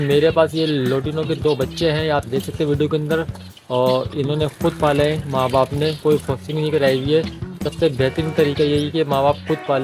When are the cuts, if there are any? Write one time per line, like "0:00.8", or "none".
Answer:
none